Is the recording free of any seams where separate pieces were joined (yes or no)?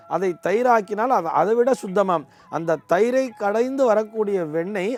yes